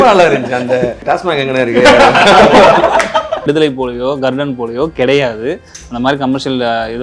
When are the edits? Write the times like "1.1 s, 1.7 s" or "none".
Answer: 1.0 s, 3.4 s